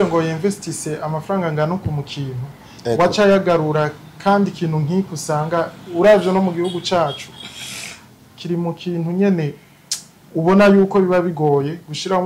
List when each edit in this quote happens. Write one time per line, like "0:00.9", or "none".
none